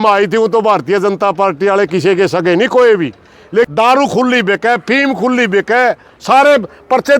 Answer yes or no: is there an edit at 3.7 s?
yes